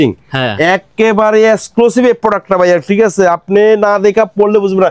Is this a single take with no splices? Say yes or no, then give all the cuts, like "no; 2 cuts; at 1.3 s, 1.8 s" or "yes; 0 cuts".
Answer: yes; 0 cuts